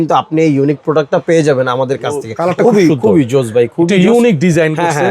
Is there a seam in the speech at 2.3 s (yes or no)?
yes